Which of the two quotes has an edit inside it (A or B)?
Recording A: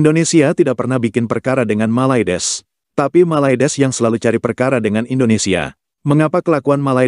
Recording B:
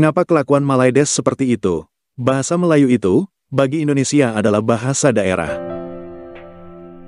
B